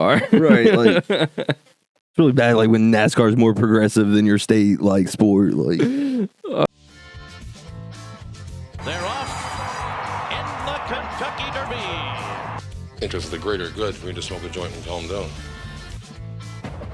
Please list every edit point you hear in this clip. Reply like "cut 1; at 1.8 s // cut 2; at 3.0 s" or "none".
cut 1; at 6.6 s

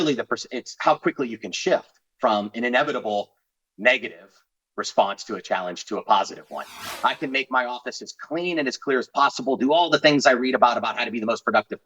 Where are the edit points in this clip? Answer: cut 1; at 6.9 s

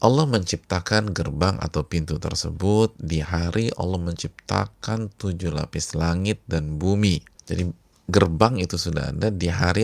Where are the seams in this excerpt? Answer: cut 1; at 7.3 s

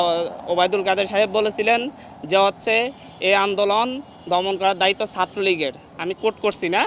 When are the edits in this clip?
none

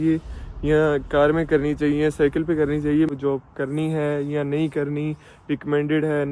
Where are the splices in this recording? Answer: cut 1; at 3.1 s

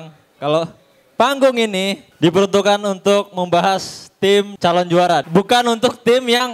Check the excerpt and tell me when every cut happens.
cut 1; at 2.0 s // cut 2; at 4.5 s // cut 3; at 5.3 s

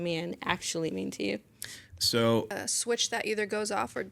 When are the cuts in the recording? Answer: cut 1; at 2.6 s

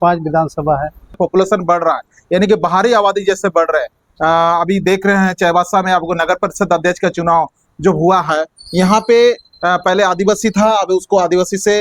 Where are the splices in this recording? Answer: cut 1; at 1.2 s

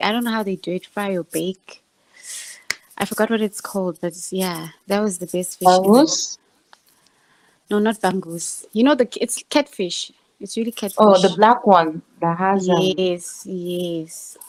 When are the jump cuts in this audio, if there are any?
none

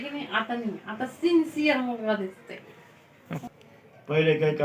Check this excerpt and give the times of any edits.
cut 1; at 3.5 s

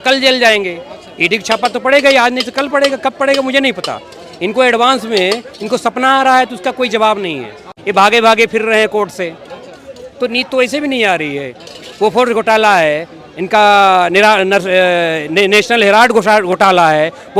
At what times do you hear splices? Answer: cut 1; at 7.7 s

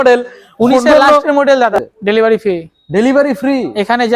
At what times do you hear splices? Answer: cut 1; at 1.7 s

